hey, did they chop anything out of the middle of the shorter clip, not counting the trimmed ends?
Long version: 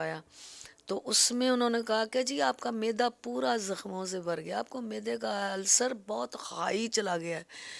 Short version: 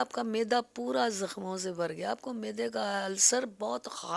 no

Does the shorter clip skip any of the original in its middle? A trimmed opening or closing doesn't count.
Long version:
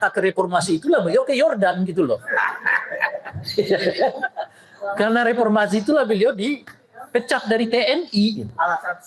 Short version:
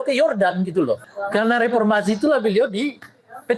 yes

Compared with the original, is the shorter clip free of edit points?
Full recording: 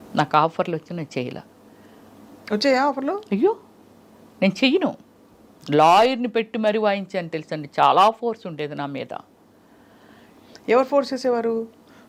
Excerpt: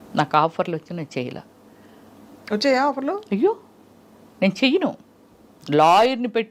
yes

